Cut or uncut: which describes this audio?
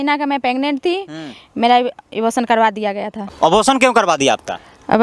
uncut